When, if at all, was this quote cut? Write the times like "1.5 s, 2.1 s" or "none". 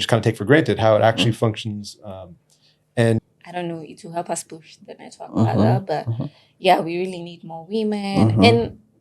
3.2 s